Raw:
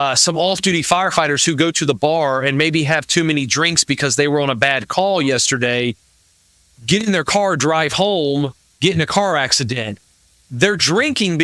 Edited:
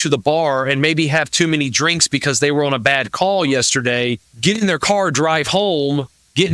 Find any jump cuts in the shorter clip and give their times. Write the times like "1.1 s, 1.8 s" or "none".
4.3 s